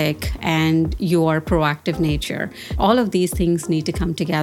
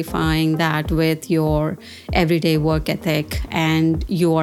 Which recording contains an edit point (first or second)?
first